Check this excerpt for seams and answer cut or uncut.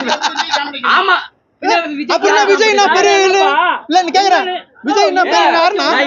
uncut